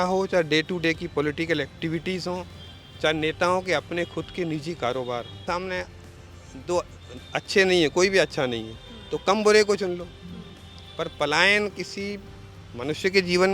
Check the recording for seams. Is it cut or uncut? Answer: cut